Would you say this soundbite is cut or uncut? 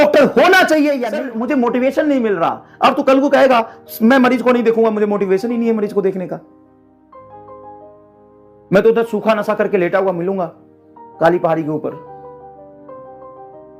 cut